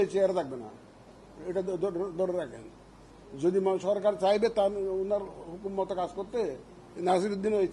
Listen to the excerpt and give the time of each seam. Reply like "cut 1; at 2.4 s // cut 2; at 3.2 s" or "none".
none